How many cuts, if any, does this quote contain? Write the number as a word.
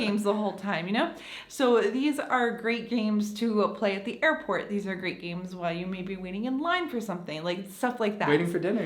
zero